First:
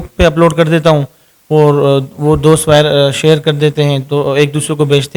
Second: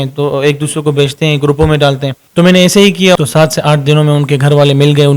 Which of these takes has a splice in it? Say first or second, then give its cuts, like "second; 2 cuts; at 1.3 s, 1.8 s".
second; 2 cuts; at 2.1 s, 3.1 s